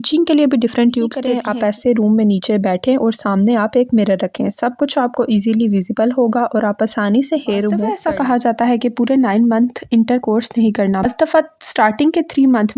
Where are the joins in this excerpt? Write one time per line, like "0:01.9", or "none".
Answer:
0:01.3
0:07.9

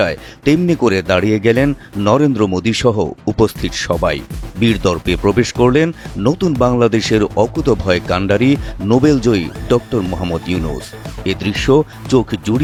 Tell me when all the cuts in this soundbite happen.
none

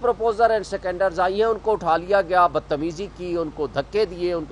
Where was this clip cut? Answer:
none

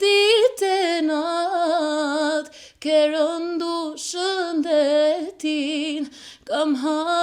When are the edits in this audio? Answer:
none

